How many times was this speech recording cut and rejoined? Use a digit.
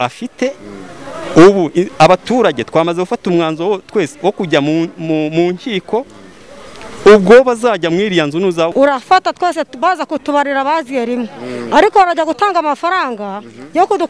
1